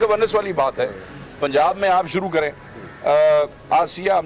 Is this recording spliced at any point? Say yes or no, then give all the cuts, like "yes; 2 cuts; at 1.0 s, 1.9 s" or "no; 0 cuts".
no; 0 cuts